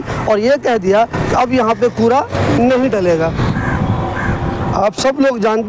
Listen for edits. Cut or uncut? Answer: uncut